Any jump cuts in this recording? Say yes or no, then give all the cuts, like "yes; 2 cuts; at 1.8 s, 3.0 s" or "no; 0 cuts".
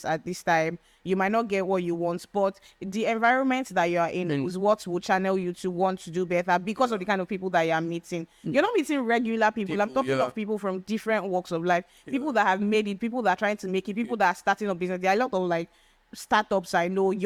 no; 0 cuts